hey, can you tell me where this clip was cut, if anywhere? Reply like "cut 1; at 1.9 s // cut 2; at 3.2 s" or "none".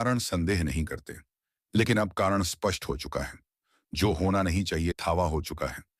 cut 1; at 5.0 s

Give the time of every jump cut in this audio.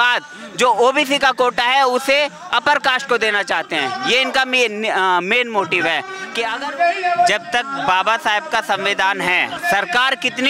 cut 1; at 6.5 s // cut 2; at 9.6 s

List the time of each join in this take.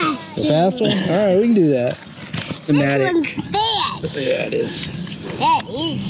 cut 1; at 2.7 s

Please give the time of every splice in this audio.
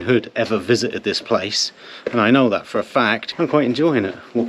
cut 1; at 3.2 s

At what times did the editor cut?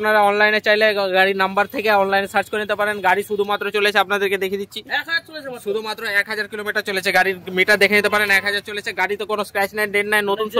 none

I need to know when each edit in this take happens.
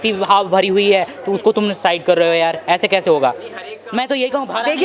none

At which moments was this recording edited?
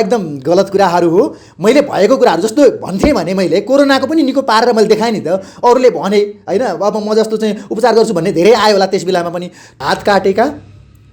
cut 1; at 9.6 s

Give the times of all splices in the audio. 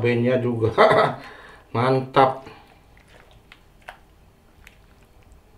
cut 1; at 3.0 s

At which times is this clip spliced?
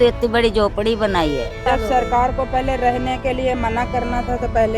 cut 1; at 1.5 s

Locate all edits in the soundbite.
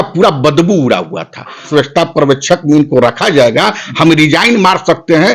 cut 1; at 1.7 s

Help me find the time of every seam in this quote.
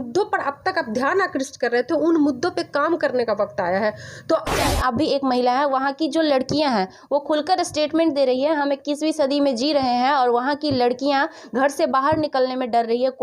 cut 1; at 4.6 s

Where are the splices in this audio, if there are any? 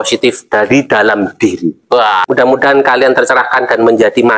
cut 1; at 2.2 s

